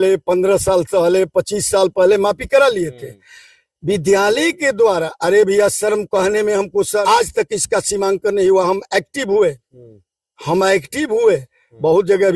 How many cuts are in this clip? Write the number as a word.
one